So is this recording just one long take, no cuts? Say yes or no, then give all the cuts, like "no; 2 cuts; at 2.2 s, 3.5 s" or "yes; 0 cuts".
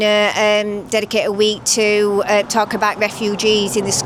yes; 0 cuts